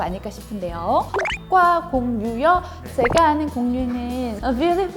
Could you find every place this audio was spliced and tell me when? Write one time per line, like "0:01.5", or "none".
0:01.1